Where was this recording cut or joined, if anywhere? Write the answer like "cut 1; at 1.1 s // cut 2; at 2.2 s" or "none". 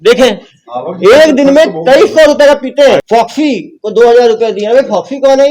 cut 1; at 3.0 s